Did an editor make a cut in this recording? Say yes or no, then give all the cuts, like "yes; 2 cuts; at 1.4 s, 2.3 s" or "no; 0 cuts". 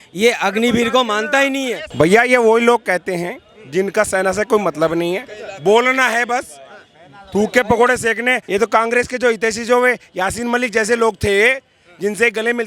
yes; 2 cuts; at 1.8 s, 8.4 s